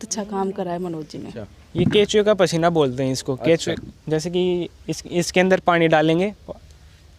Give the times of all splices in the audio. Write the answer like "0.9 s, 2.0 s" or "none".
1.4 s